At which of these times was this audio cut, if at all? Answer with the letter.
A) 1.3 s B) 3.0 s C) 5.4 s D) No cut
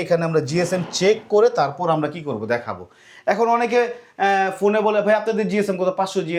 D